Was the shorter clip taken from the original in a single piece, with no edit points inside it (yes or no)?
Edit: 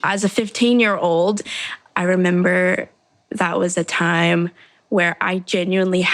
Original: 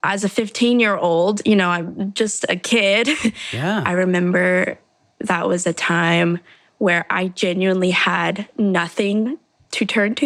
no